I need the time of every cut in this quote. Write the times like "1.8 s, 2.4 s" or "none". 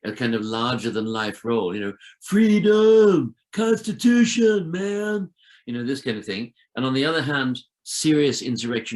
7.8 s